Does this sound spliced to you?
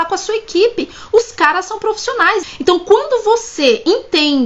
yes; 1 cut; at 2.4 s

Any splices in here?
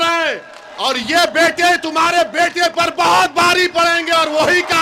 no; 0 cuts

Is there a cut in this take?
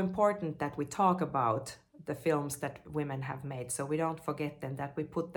no; 0 cuts

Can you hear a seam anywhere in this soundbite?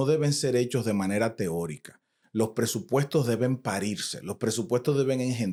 no; 0 cuts

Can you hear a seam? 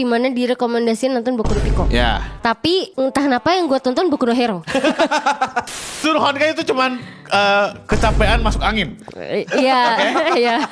yes; 3 cuts; at 2.9 s, 4.6 s, 5.9 s

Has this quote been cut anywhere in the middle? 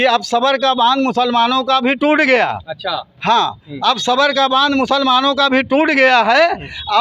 no; 0 cuts

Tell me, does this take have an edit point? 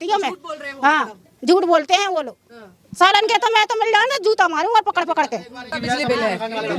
yes; 1 cut; at 5.7 s

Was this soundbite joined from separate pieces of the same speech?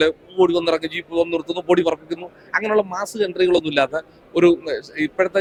no; 0 cuts

